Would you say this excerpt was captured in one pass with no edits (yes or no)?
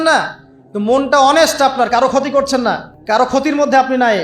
no